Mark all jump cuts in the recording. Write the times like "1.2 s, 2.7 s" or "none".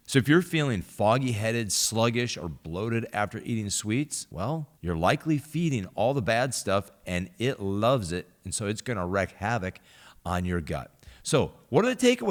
none